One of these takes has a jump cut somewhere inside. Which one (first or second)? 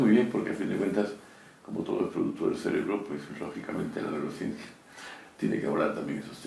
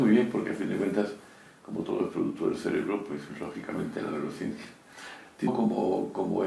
first